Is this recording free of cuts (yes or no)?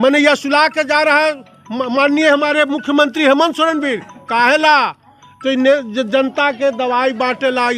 yes